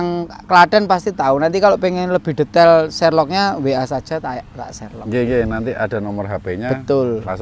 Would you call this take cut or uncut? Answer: uncut